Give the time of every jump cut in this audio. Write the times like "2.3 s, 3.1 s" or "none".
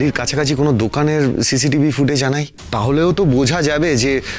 2.6 s